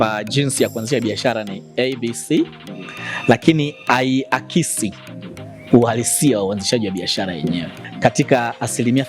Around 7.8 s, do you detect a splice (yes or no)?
yes